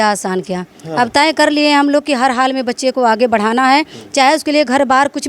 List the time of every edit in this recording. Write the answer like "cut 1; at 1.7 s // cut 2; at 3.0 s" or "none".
none